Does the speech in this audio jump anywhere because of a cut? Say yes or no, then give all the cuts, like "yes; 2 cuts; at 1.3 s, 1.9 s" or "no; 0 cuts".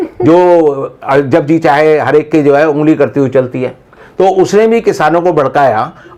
no; 0 cuts